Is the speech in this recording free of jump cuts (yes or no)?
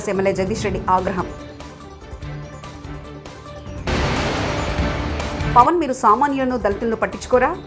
yes